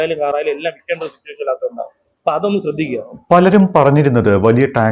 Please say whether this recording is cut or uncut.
uncut